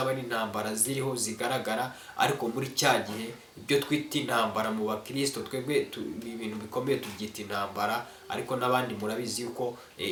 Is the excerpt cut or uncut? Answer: uncut